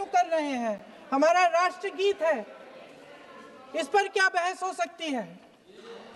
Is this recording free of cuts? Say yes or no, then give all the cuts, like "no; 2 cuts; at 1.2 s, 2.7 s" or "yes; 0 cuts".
yes; 0 cuts